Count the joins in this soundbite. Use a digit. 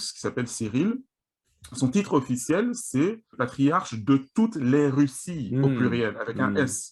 1